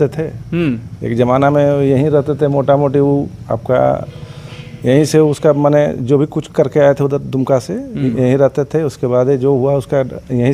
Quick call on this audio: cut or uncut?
uncut